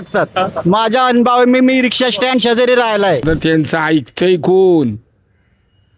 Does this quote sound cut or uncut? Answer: cut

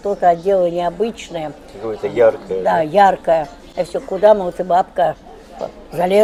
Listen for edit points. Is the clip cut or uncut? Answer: uncut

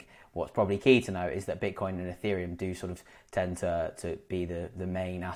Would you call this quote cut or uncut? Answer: uncut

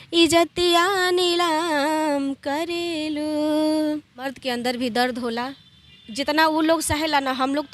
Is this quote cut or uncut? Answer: cut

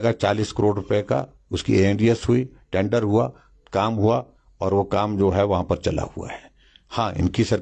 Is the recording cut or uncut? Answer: uncut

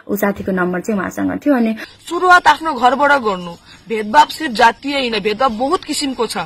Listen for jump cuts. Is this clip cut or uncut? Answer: cut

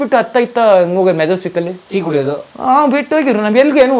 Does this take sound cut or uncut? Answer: uncut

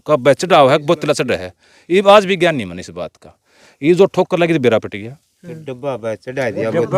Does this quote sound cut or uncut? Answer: uncut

